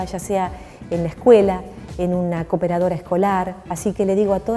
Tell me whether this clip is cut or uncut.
cut